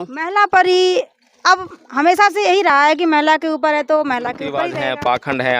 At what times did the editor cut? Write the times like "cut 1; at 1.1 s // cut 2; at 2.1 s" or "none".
cut 1; at 4.6 s